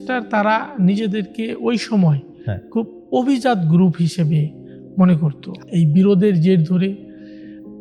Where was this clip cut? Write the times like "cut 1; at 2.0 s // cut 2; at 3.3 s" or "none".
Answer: cut 1; at 5.5 s